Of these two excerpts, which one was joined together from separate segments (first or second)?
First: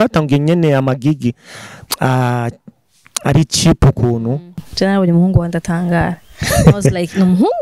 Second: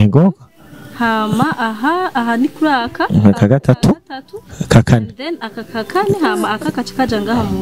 first